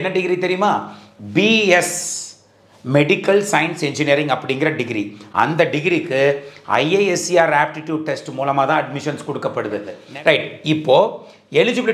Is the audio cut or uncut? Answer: cut